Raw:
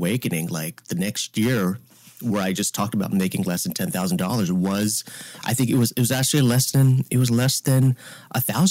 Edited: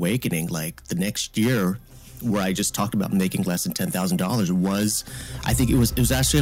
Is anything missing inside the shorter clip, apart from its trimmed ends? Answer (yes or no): no